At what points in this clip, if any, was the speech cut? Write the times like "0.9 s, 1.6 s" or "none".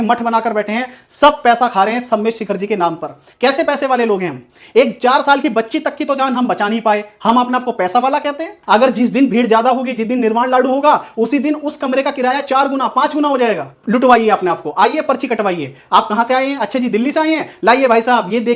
3.2 s, 8.5 s, 13.7 s